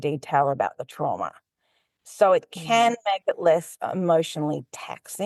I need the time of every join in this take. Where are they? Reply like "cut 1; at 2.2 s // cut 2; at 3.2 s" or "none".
none